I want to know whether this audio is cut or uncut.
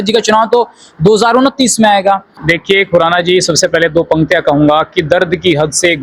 cut